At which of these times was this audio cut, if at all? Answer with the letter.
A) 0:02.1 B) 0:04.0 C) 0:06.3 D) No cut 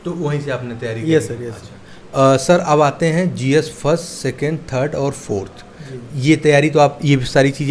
D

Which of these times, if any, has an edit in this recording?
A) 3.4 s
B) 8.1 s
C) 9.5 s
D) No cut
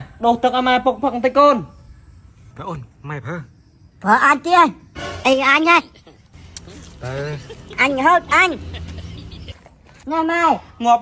C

